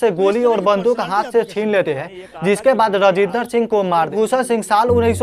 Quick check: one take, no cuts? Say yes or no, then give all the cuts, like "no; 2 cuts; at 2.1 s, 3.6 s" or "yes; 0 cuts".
no; 1 cut; at 4.1 s